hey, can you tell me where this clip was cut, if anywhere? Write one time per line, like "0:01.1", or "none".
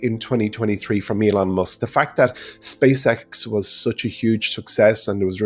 none